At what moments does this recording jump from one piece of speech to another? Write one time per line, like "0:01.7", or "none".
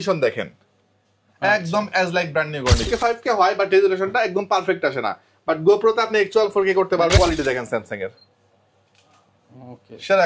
0:02.9
0:07.2